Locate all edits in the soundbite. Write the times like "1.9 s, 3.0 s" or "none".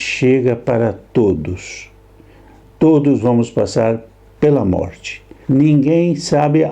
5.3 s